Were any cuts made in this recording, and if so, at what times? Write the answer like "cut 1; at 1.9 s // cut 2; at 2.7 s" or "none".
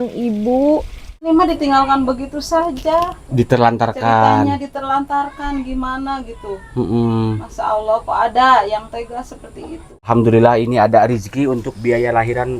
cut 1; at 1.3 s // cut 2; at 10.0 s

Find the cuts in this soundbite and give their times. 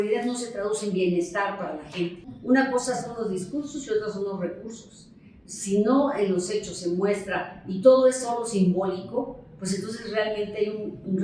cut 1; at 2.3 s

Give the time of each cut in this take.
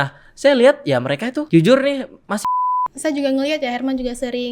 cut 1; at 1.5 s // cut 2; at 2.4 s

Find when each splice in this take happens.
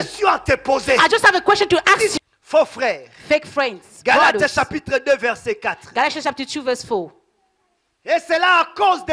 cut 1; at 2.1 s

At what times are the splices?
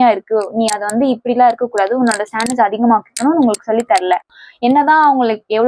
cut 1; at 4.3 s

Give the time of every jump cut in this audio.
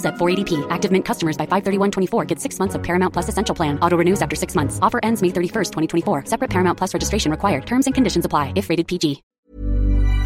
cut 1; at 9.3 s

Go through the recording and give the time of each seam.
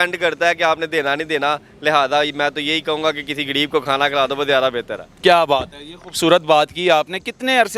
none

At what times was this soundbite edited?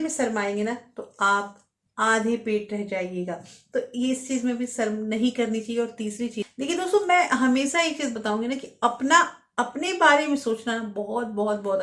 cut 1; at 6.5 s

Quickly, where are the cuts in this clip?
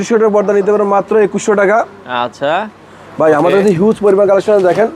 none

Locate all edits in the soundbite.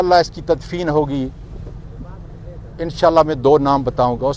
none

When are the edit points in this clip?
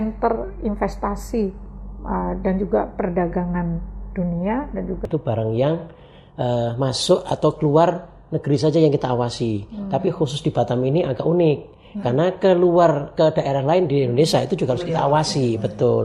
cut 1; at 5.0 s

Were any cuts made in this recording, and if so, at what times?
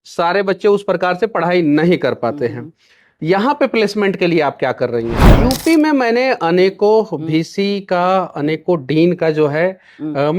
cut 1; at 5.3 s

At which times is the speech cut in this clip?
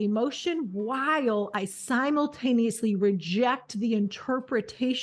none

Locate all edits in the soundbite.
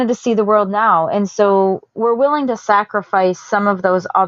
none

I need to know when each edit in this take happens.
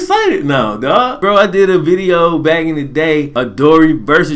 cut 1; at 1.2 s // cut 2; at 3.3 s

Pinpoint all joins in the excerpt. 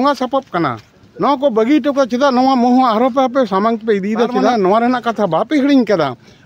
cut 1; at 4.4 s

